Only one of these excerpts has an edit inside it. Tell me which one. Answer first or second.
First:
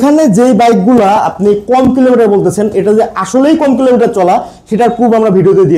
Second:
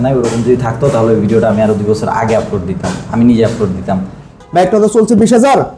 second